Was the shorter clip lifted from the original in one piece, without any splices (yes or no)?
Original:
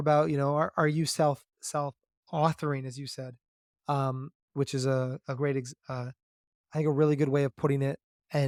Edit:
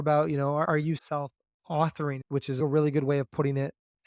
no